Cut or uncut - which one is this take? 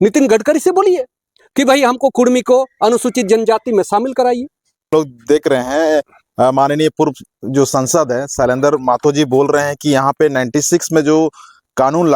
cut